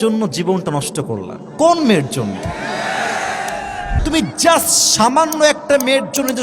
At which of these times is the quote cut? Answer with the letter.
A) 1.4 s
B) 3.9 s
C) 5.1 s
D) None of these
B